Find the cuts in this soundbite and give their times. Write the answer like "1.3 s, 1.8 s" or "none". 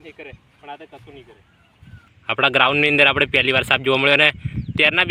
2.0 s